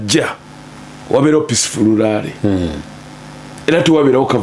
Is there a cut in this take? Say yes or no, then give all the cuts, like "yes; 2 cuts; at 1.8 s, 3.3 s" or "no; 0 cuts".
no; 0 cuts